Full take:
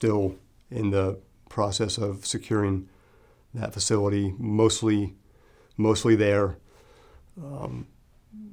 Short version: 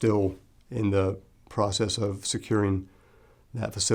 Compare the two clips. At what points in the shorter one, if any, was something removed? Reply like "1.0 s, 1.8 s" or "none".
none